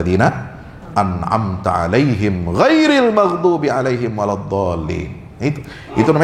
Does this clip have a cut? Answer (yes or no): no